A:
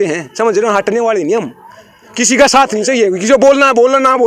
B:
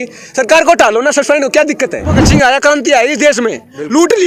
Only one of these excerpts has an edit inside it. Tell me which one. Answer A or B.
B